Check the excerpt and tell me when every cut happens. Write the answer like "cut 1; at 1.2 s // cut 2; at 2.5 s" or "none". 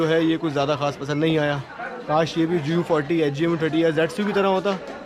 none